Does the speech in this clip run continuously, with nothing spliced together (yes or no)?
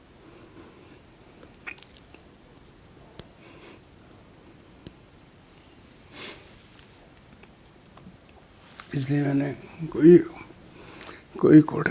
yes